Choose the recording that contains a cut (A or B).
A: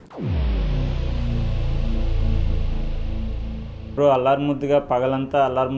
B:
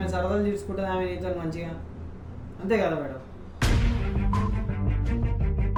A